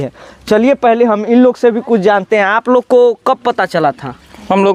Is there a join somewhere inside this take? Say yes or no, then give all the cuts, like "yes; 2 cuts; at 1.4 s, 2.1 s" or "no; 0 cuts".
no; 0 cuts